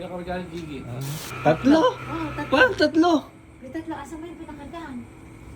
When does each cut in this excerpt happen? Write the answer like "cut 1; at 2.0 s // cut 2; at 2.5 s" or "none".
cut 1; at 1.3 s